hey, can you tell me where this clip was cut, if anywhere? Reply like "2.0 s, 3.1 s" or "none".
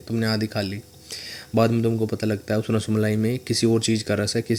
none